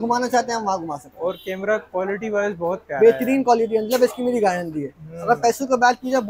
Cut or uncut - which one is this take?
uncut